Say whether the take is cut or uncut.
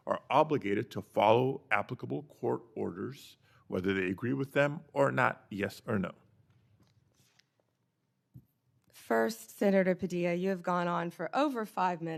uncut